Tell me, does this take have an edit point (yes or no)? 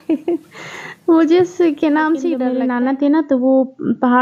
yes